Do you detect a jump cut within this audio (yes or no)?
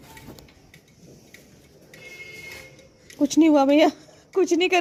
no